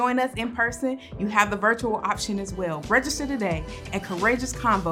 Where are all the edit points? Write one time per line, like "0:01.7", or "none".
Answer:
0:02.8